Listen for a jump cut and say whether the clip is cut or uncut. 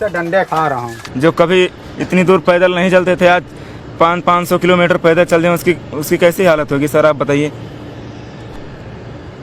cut